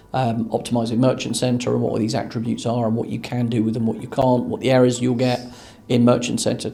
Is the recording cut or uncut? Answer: uncut